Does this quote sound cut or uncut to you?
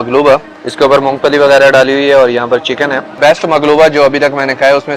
cut